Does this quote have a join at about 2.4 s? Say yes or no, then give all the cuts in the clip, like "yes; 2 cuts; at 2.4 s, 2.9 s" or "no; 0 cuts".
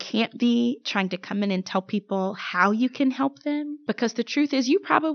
no; 1 cut; at 3.7 s